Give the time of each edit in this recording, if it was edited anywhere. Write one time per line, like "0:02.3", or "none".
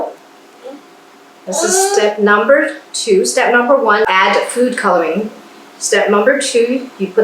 none